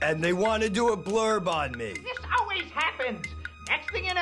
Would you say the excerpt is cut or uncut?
uncut